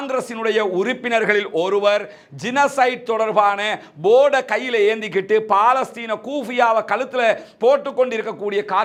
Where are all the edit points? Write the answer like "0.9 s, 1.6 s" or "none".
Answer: none